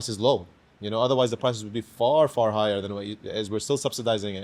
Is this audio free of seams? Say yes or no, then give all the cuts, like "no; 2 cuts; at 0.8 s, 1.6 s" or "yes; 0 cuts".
yes; 0 cuts